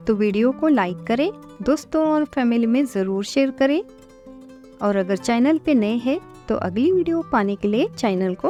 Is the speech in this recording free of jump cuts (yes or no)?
yes